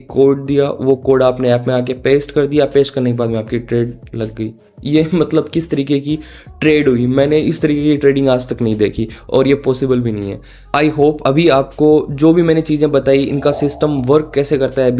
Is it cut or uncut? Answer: uncut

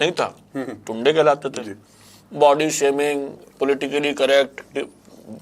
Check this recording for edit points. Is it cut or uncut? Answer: uncut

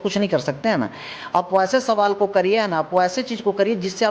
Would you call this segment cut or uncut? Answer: cut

